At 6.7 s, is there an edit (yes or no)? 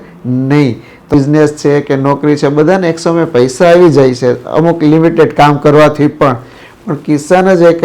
no